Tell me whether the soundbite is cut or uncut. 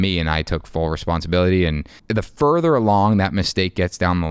cut